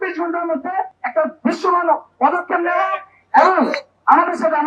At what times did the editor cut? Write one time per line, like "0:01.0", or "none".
0:01.0